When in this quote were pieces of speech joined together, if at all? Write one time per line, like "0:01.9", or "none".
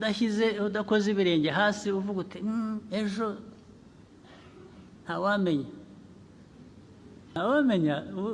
0:07.4